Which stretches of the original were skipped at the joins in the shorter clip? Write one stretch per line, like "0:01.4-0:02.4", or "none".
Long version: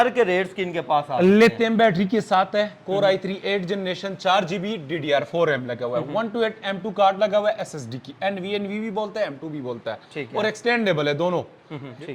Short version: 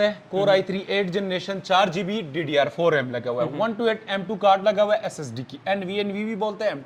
none